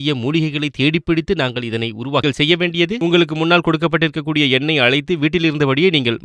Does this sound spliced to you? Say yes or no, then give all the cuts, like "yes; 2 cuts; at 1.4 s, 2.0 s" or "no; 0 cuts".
yes; 1 cut; at 3.0 s